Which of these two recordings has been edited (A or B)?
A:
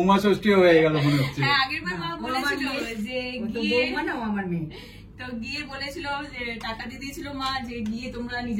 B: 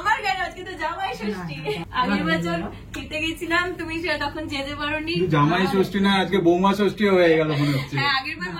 B